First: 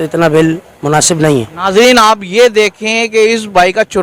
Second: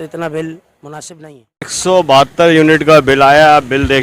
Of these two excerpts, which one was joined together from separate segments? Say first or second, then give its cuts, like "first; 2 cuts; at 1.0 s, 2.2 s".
second; 1 cut; at 1.7 s